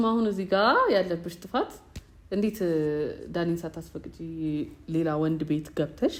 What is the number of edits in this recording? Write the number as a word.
zero